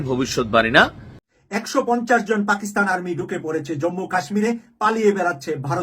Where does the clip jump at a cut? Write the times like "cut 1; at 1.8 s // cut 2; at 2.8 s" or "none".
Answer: cut 1; at 1.2 s

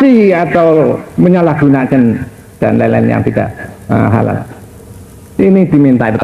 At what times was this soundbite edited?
none

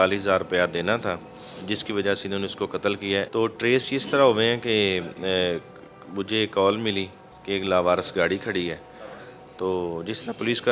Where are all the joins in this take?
cut 1; at 3.3 s

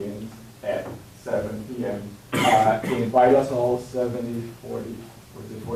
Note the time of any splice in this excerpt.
none

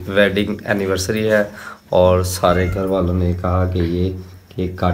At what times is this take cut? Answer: none

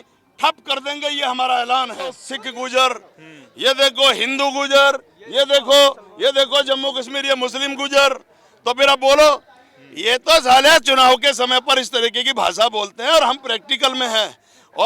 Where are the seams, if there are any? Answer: cut 1; at 2.3 s

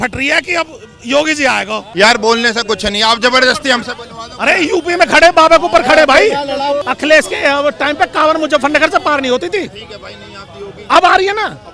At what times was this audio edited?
cut 1; at 1.9 s // cut 2; at 6.8 s

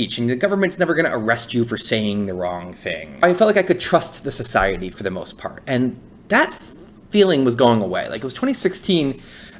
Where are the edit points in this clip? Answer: cut 1; at 3.2 s // cut 2; at 4.9 s

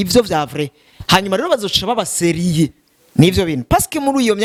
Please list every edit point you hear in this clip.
none

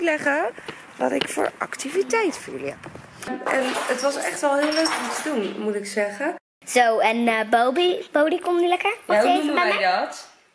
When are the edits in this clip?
cut 1; at 3.3 s // cut 2; at 6.5 s

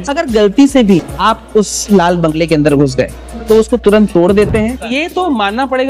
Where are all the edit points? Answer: cut 1; at 1.1 s // cut 2; at 4.9 s

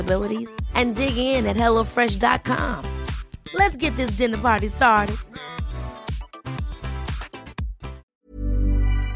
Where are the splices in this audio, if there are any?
cut 1; at 8.1 s

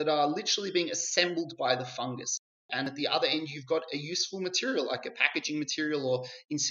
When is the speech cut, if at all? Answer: cut 1; at 2.5 s

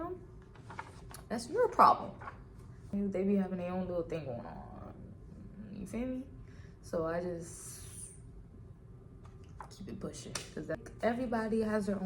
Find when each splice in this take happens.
cut 1; at 2.9 s // cut 2; at 10.8 s

